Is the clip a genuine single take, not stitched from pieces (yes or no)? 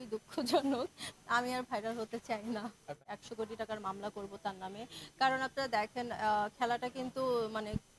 no